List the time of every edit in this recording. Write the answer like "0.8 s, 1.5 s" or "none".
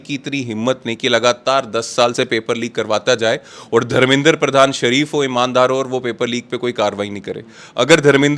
none